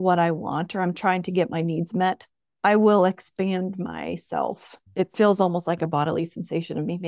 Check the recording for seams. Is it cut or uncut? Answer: uncut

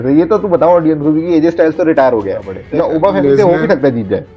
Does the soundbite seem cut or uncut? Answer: cut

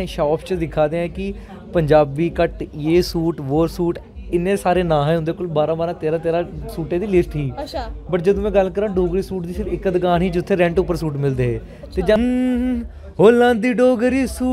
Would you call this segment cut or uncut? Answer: cut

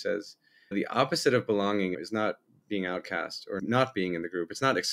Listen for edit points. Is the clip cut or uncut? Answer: cut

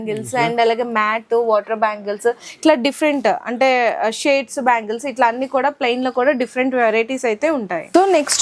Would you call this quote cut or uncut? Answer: uncut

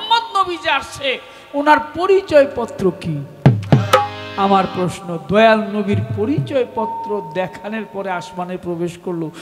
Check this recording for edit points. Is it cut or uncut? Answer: uncut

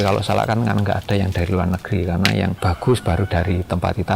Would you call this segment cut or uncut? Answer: cut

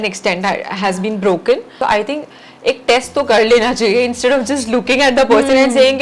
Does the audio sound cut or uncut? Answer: cut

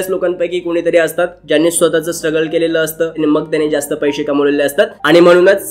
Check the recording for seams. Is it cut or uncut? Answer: uncut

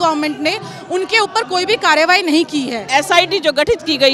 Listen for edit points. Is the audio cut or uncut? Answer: cut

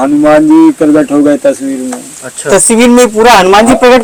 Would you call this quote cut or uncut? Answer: uncut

